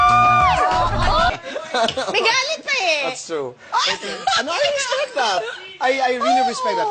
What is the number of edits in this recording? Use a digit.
1